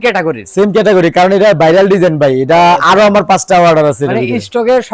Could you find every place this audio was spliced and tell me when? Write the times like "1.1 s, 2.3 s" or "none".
none